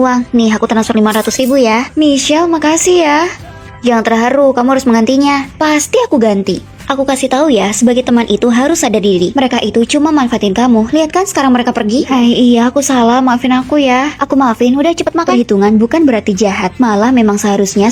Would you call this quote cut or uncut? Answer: uncut